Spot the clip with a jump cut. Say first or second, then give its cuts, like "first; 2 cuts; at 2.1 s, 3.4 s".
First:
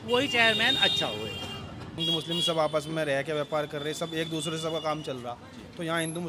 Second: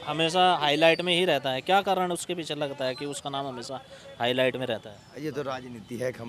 first; 1 cut; at 2.0 s